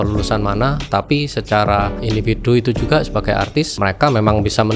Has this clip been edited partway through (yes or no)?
yes